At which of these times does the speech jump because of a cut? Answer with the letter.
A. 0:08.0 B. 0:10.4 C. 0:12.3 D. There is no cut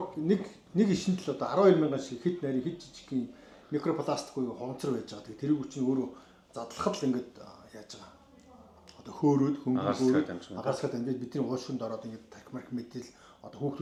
D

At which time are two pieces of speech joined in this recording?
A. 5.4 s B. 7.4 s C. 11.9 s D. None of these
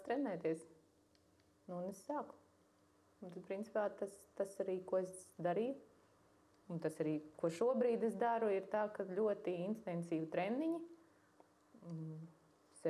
D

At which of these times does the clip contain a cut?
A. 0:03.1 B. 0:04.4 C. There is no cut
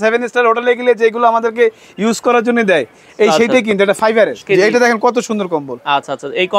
B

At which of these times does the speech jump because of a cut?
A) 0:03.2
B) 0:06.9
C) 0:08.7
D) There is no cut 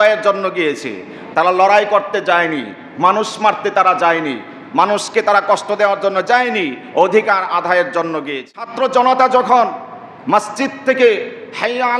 C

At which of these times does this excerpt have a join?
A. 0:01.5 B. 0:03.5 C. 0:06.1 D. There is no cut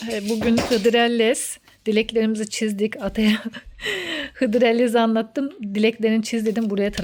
D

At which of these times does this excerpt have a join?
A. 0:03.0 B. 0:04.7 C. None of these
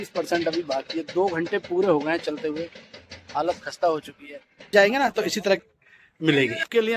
B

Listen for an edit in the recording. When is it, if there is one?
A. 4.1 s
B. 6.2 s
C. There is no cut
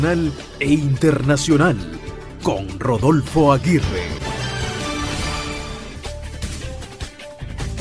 B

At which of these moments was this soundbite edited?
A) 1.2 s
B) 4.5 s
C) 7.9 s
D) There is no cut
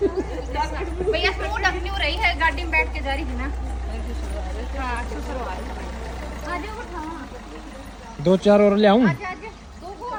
D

